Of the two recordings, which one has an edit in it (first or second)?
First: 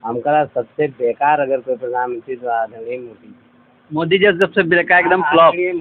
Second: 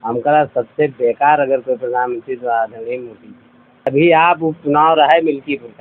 second